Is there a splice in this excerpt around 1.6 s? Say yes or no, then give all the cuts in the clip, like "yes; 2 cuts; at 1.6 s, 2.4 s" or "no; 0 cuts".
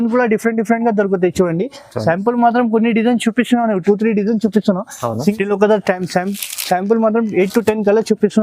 no; 1 cut; at 5.1 s